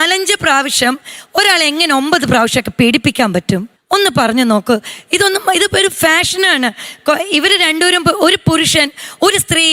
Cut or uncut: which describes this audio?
uncut